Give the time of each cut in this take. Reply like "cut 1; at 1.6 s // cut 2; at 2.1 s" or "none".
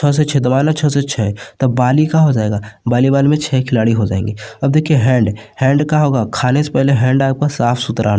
none